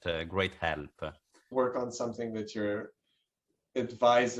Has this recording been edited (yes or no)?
yes